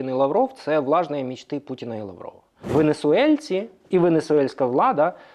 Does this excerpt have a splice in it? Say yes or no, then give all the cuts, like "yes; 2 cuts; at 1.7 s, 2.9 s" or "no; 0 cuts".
yes; 1 cut; at 2.5 s